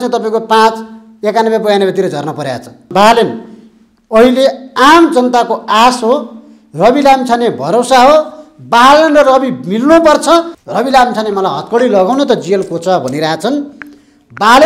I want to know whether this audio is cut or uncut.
cut